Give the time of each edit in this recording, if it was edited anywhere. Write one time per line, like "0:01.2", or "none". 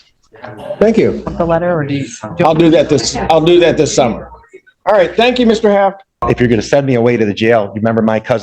0:06.2